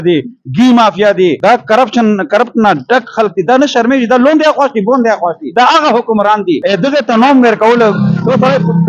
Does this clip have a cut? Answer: yes; 3 cuts; at 1.4 s, 5.4 s, 6.6 s

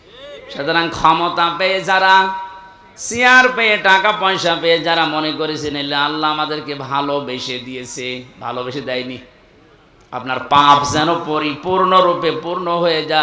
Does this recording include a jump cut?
no; 0 cuts

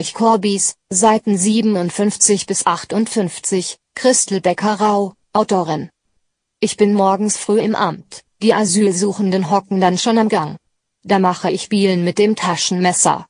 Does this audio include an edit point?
no; 0 cuts

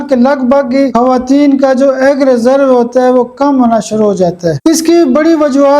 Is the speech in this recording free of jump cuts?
no; 2 cuts; at 0.9 s, 4.6 s

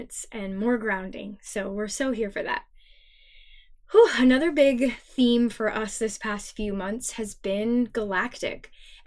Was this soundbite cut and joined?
no; 0 cuts

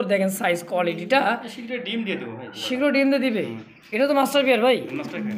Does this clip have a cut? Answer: no; 0 cuts

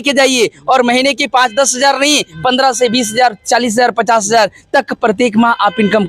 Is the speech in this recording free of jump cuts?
yes; 0 cuts

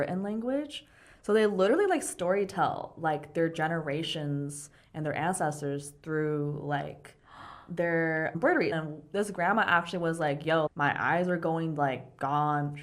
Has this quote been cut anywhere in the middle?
yes; 1 cut; at 8.7 s

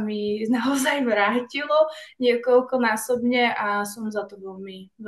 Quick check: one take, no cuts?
yes; 0 cuts

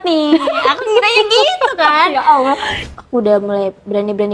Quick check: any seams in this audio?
yes; 1 cut; at 2.8 s

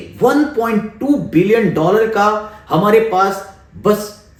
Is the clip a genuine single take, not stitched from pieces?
yes; 0 cuts

